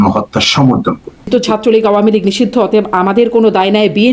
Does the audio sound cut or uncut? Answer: cut